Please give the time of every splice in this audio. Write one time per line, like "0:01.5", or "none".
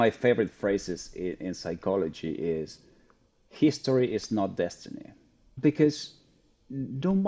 0:05.5